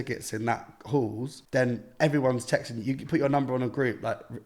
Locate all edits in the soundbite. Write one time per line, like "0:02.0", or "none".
0:01.3